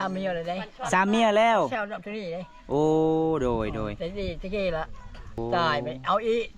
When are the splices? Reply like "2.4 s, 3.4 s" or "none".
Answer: 5.4 s